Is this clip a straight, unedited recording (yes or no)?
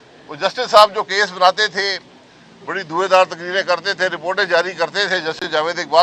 yes